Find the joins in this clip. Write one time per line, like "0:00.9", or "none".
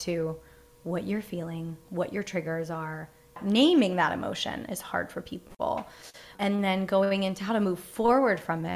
0:03.4
0:06.3